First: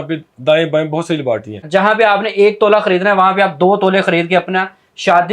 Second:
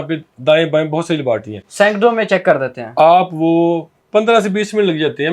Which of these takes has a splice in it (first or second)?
first